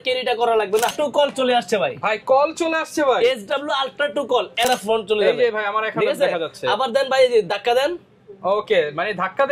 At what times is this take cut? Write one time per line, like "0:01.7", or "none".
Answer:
0:00.9
0:04.7